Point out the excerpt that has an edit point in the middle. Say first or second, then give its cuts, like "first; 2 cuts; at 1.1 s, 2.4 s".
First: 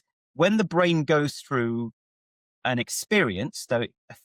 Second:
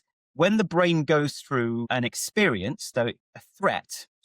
second; 1 cut; at 1.9 s